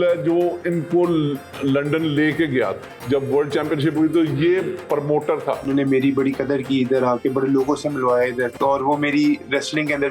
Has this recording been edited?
yes; 3 cuts; at 2.9 s, 5.7 s, 8.5 s

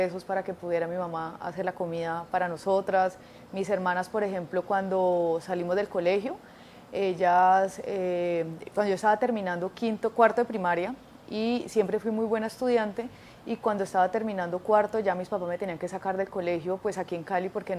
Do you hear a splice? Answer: no; 0 cuts

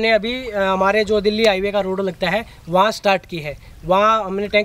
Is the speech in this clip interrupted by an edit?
no; 0 cuts

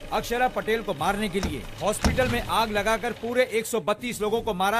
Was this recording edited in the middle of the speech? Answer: no; 0 cuts

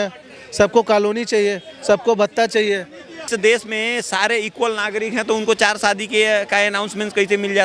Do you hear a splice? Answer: yes; 1 cut; at 3.2 s

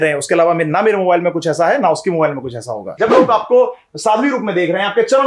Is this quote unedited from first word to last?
no; 1 cut; at 2.9 s

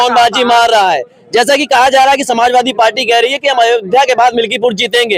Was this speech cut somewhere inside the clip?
no; 0 cuts

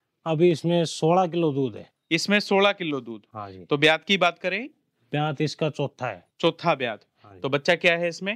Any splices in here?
no; 0 cuts

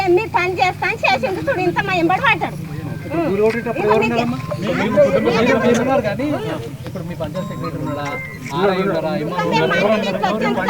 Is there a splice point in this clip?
no; 0 cuts

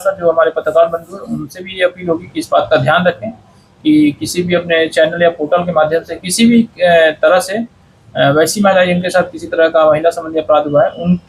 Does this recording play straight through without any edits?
yes; 0 cuts

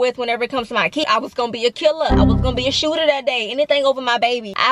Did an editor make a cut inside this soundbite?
yes; 1 cut; at 1.0 s

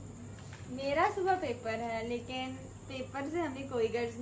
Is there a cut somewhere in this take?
no; 0 cuts

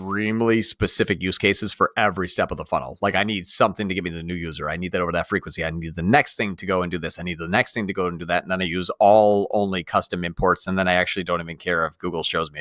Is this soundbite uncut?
yes; 0 cuts

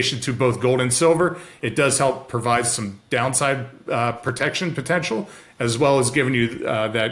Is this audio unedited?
yes; 0 cuts

